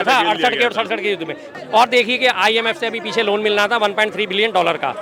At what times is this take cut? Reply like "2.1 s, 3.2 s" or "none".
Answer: 1.4 s